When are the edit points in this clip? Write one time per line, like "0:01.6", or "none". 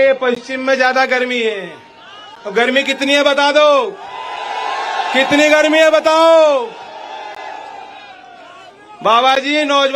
none